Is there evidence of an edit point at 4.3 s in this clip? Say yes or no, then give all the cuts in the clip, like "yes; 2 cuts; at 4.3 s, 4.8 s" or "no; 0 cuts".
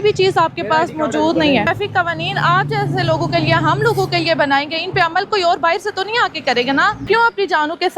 no; 2 cuts; at 1.7 s, 7.1 s